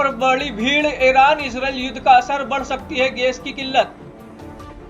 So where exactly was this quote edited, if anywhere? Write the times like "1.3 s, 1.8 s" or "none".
3.9 s